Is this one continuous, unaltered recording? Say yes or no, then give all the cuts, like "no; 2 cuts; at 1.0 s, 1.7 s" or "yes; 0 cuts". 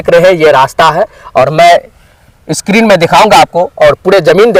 yes; 0 cuts